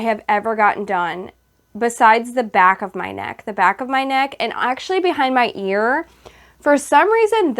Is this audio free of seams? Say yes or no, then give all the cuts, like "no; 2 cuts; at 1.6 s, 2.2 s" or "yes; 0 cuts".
yes; 0 cuts